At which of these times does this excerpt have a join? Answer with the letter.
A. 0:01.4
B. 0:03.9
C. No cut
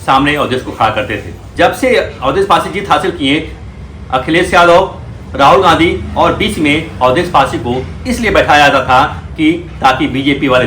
A